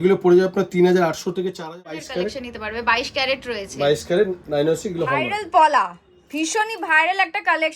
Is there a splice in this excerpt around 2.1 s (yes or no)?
yes